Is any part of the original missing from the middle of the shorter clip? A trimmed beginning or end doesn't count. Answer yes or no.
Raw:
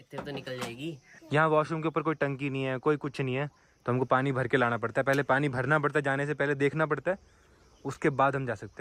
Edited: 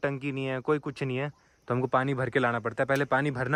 no